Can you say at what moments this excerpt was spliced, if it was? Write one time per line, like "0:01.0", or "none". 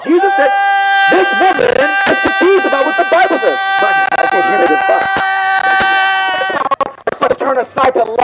0:06.5